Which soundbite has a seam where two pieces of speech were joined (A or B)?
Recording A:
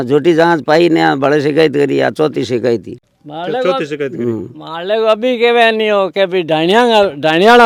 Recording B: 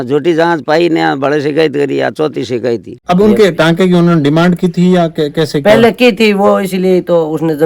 B